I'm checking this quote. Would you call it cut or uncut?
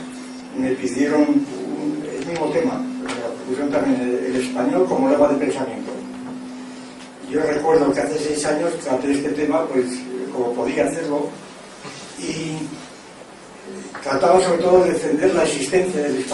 cut